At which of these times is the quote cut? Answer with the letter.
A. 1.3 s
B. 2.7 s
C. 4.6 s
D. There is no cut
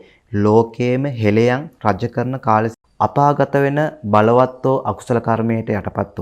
B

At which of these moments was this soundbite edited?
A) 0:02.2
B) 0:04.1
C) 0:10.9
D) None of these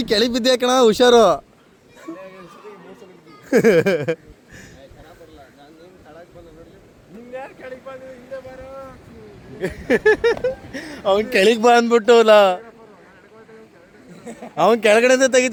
D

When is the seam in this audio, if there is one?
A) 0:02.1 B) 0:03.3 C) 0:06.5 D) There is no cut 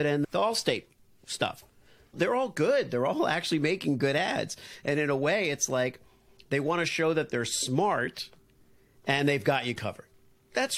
D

